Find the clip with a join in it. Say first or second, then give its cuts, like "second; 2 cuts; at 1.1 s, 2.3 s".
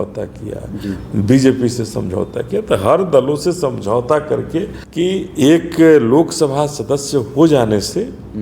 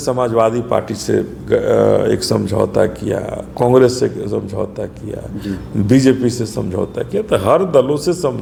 first; 1 cut; at 4.8 s